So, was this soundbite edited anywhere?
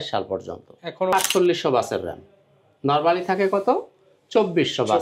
yes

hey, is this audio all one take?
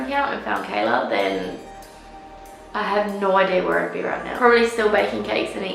no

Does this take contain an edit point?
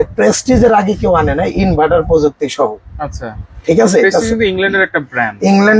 no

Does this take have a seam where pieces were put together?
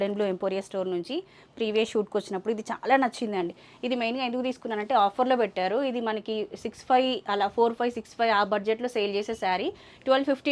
no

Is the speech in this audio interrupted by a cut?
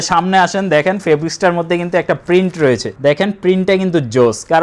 no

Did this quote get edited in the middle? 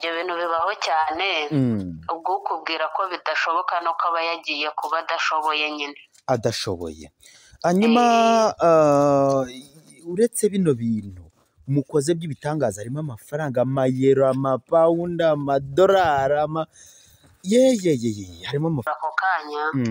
yes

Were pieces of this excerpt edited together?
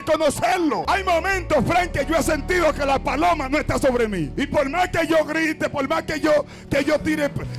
yes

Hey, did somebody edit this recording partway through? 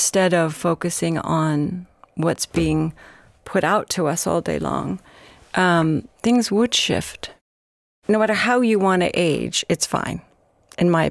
yes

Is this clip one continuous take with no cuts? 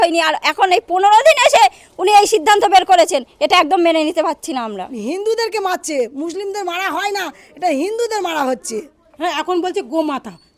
no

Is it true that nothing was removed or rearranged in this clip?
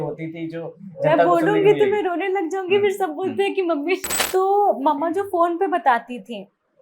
no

